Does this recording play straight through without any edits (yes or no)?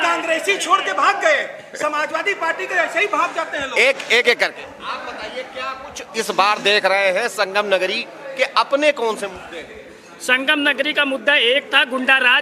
yes